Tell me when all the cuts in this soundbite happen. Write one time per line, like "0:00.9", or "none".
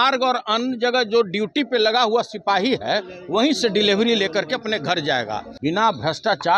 0:05.5